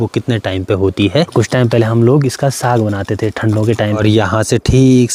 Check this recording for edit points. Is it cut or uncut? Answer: cut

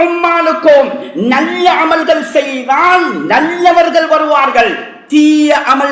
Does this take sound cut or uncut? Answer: uncut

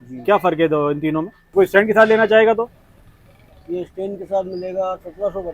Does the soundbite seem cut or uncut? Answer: cut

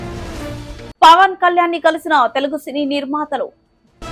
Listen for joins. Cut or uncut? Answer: uncut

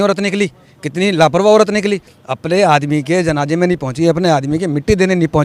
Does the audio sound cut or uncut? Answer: uncut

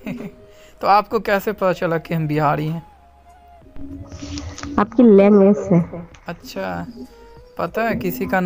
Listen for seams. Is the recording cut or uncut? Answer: uncut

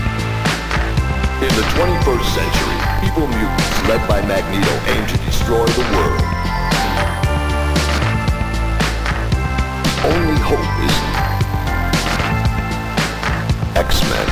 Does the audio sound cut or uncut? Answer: uncut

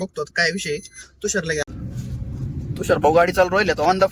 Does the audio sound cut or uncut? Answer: cut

